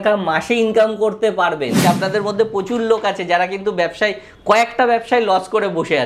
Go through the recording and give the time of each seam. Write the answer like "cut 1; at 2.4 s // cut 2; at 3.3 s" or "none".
cut 1; at 1.8 s